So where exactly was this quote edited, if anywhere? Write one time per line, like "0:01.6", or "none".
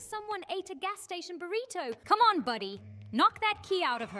0:02.0